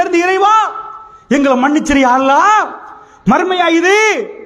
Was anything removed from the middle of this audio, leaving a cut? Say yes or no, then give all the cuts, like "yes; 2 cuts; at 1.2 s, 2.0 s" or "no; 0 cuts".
yes; 1 cut; at 1.8 s